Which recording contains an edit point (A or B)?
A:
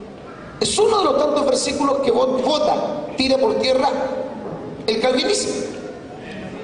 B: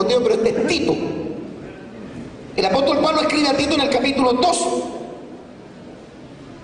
B